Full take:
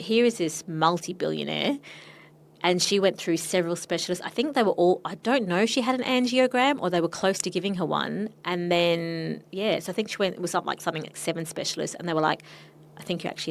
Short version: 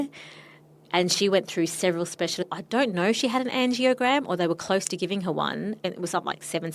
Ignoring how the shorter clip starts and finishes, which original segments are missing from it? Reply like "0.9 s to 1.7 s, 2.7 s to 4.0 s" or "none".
4.2 s to 5.1 s, 8.5 s to 10.7 s